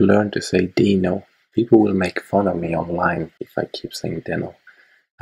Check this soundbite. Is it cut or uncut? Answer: cut